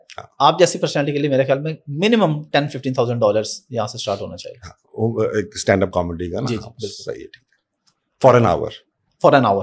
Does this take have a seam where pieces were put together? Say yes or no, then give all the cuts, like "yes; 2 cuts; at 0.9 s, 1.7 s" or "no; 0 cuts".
no; 0 cuts